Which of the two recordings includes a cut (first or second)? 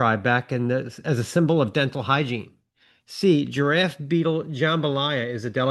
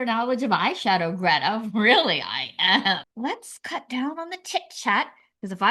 second